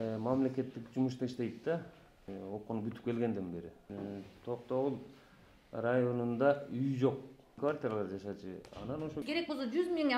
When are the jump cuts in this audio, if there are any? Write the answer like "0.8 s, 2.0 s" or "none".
2.3 s, 3.9 s, 7.6 s, 9.2 s